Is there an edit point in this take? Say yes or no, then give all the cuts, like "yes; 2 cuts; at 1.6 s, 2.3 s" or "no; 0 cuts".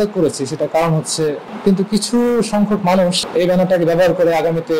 yes; 2 cuts; at 1.5 s, 3.2 s